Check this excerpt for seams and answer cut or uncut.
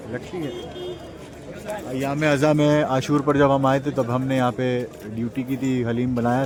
uncut